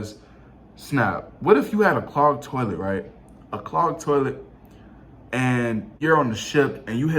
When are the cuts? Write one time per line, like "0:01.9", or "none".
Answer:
0:05.9